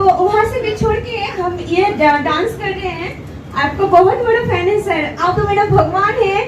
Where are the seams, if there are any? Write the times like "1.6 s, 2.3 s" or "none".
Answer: 5.4 s